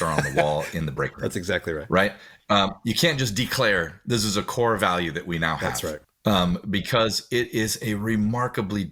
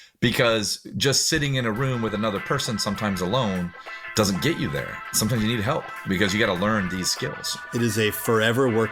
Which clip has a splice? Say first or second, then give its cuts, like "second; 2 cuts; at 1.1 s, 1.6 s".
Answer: second; 1 cut; at 7.7 s